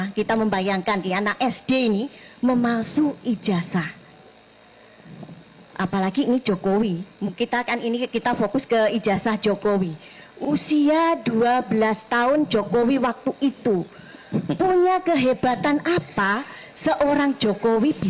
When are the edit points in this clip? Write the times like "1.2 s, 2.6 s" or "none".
none